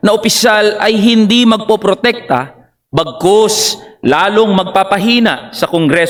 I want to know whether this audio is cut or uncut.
uncut